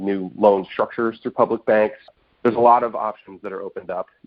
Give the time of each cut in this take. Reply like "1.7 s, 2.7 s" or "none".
2.1 s

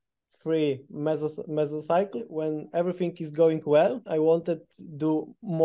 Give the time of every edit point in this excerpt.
2.3 s, 4.0 s

